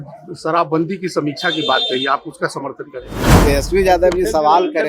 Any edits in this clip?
yes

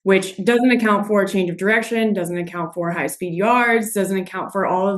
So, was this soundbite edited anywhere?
no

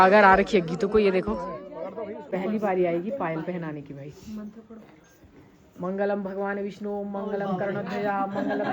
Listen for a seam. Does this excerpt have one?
yes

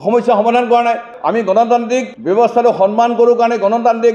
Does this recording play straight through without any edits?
no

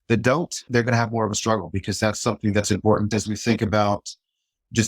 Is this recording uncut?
no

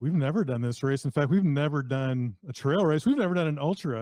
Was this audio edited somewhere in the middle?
no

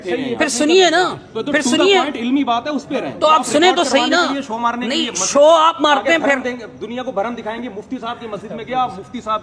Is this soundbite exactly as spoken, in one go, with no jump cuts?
yes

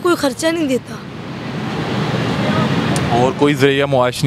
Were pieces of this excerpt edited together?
no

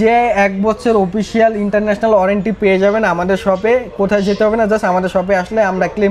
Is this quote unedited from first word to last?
yes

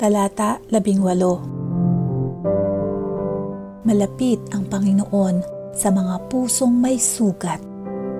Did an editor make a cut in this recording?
yes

